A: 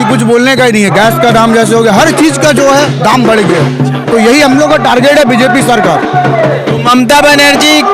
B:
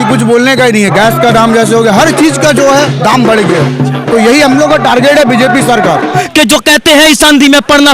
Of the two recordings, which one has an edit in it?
B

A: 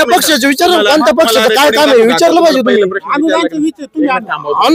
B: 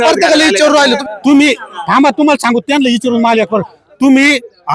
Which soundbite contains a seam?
B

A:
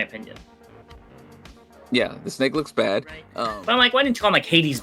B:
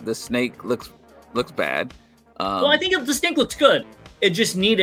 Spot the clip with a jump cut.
A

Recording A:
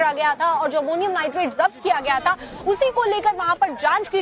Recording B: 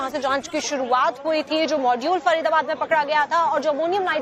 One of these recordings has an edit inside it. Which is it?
A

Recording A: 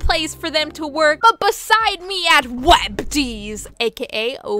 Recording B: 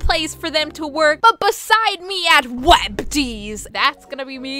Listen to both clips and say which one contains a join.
B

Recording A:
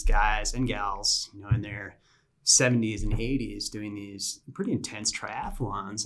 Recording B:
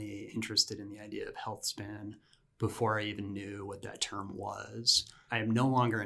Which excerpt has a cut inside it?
B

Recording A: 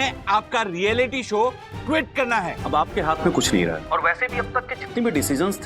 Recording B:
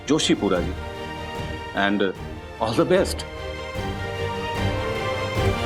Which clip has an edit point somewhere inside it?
A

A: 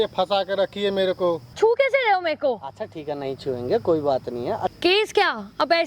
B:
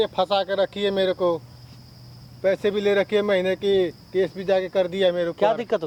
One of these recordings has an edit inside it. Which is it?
A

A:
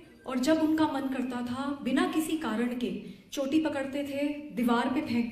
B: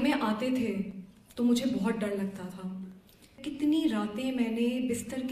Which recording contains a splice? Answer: B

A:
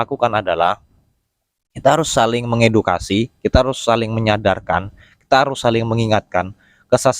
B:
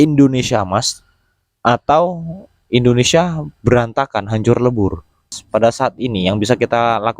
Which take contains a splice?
B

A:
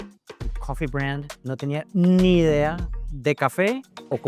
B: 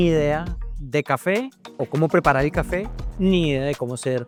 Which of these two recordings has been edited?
A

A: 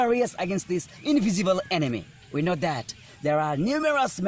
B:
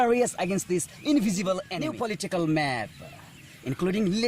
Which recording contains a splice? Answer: B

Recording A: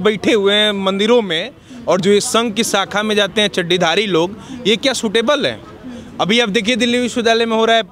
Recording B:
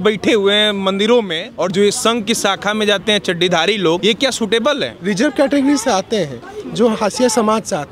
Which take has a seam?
B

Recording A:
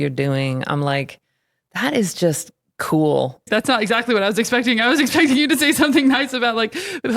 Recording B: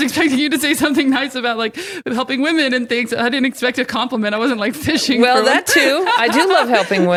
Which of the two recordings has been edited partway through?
A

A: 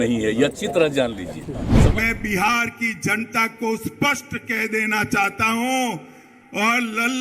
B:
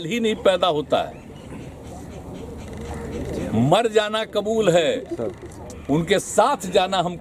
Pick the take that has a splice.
A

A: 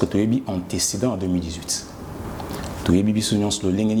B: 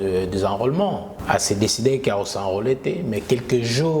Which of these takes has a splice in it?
B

